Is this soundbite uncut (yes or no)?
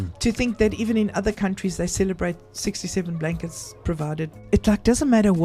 no